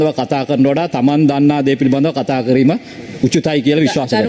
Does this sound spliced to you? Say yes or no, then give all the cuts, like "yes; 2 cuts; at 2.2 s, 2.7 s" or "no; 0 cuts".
no; 0 cuts